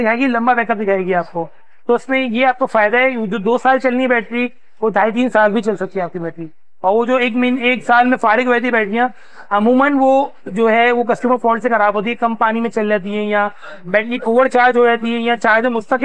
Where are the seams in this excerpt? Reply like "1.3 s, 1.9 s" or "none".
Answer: none